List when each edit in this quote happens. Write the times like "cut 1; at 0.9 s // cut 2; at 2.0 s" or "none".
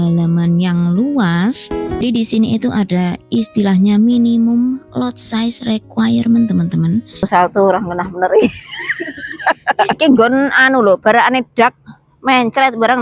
cut 1; at 2.0 s // cut 2; at 7.3 s // cut 3; at 9.9 s